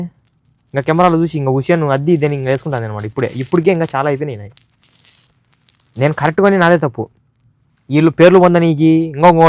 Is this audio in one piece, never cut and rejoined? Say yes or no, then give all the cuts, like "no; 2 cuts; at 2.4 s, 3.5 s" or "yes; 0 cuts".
yes; 0 cuts